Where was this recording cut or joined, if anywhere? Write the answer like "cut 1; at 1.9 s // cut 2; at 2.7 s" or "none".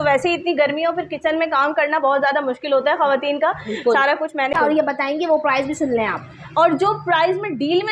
cut 1; at 4.6 s